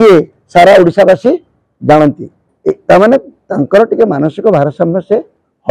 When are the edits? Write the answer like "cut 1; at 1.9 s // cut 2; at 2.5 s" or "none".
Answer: cut 1; at 2.5 s

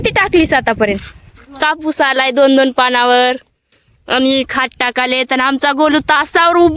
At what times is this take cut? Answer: cut 1; at 1.6 s

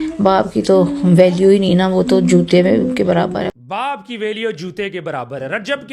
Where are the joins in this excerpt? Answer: cut 1; at 3.5 s

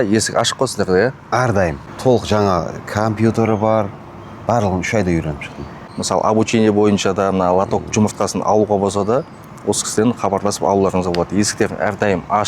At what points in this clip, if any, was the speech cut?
cut 1; at 1.8 s // cut 2; at 5.9 s

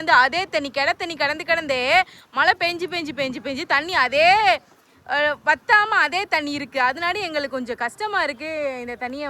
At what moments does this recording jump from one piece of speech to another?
none

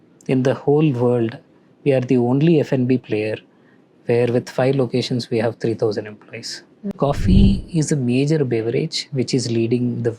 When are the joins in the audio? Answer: cut 1; at 7.0 s

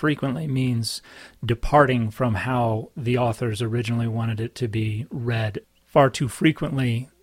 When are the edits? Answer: cut 1; at 5.6 s

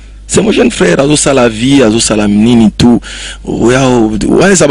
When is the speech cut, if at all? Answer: none

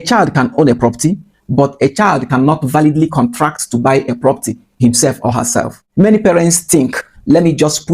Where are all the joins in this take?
cut 1; at 5.8 s

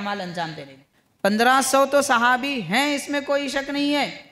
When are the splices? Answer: cut 1; at 1.4 s

